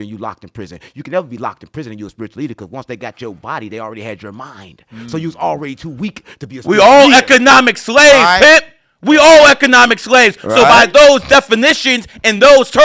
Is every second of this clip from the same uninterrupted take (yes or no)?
yes